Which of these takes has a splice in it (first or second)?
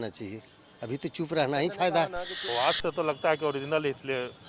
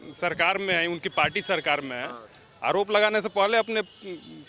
first